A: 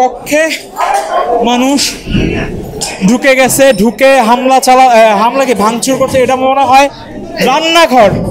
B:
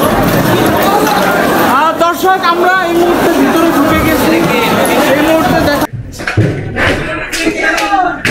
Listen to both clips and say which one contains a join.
B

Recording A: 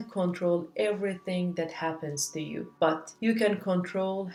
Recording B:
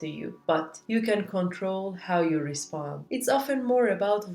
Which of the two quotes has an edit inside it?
B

